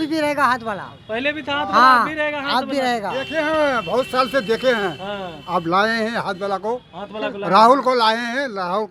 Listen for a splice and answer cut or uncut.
uncut